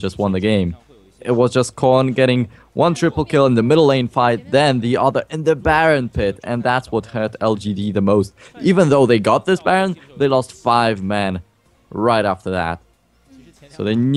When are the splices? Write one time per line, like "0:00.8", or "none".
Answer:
0:06.4